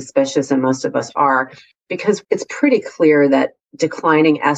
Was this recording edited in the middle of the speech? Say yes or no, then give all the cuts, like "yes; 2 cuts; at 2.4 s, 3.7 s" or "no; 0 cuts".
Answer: yes; 1 cut; at 2.2 s